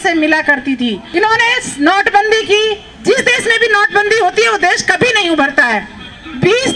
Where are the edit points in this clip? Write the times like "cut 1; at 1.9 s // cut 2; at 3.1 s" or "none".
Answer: cut 1; at 1.0 s